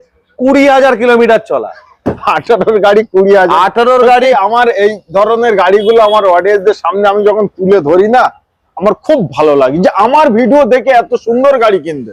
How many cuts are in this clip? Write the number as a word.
zero